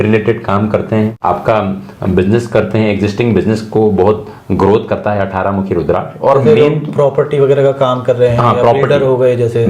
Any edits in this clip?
no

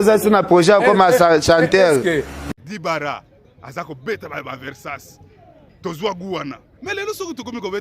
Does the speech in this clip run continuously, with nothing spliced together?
no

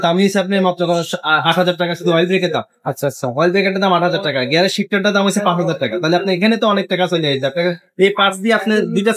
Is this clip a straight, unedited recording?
yes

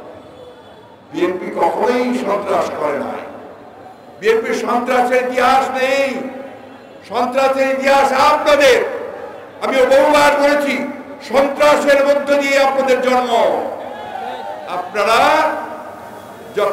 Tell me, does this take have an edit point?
no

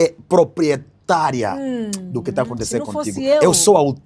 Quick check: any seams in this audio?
no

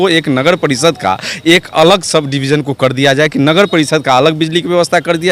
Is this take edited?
no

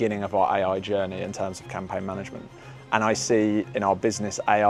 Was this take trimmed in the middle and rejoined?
no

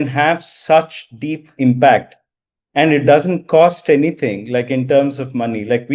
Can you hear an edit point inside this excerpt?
no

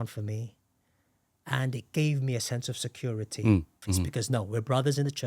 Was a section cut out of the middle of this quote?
yes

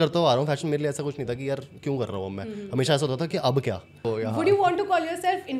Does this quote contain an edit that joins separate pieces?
yes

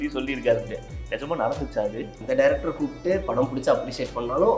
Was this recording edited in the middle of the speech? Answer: yes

